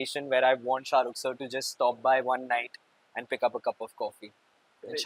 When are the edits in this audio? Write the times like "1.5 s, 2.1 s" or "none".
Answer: none